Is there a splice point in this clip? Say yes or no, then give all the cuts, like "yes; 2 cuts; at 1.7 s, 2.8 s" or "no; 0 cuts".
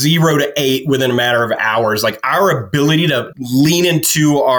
no; 0 cuts